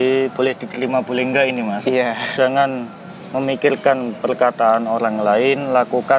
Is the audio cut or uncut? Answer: cut